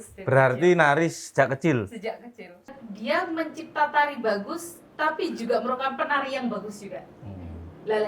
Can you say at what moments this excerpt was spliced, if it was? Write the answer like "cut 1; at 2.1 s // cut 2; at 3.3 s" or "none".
cut 1; at 2.7 s